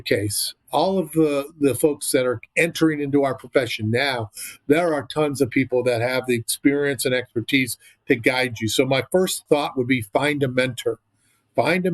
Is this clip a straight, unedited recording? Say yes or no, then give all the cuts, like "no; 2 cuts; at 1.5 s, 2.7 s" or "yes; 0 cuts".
no; 1 cut; at 9.4 s